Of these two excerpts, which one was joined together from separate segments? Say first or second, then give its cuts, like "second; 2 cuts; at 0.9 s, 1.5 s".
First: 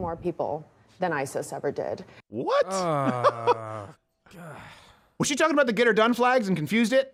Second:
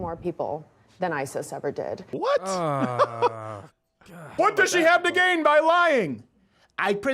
second; 2 cuts; at 2.1 s, 4.3 s